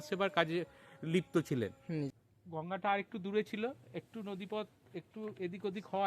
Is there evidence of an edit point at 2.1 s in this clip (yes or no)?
yes